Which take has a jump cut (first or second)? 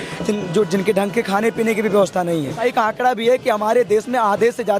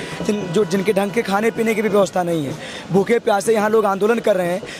first